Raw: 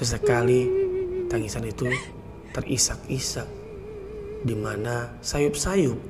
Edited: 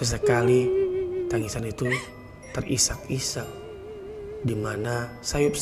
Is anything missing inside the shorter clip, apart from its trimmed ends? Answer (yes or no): no